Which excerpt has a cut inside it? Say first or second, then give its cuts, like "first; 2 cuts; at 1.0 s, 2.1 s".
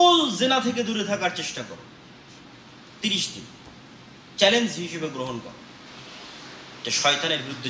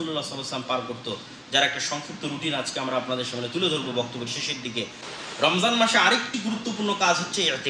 second; 1 cut; at 5.0 s